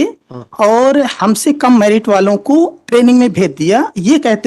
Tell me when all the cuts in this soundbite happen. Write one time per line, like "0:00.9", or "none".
0:02.8